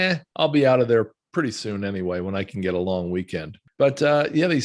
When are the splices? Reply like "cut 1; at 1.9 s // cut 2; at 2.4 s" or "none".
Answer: cut 1; at 3.6 s